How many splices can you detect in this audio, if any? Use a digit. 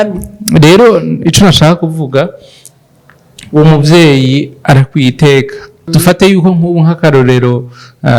1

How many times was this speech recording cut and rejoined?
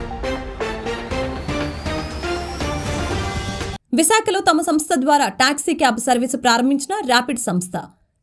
0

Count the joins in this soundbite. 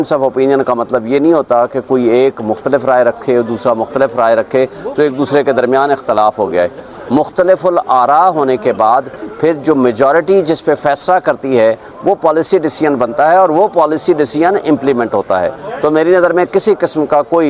0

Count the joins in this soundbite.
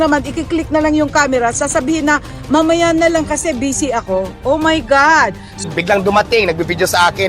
1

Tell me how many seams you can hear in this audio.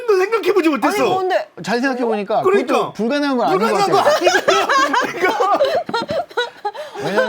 1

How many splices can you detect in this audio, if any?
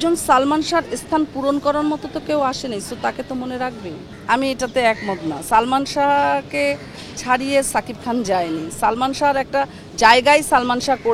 0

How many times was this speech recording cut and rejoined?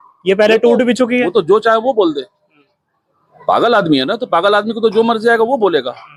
0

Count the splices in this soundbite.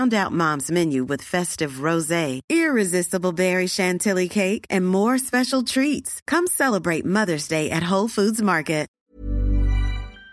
1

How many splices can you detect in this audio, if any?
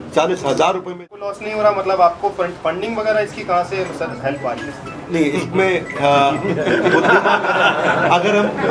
1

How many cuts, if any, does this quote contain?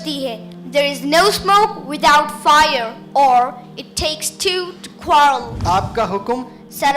1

